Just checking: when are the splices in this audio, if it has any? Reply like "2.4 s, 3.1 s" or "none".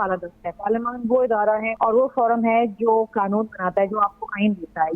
1.7 s